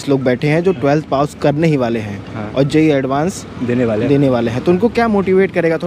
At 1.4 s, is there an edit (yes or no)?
no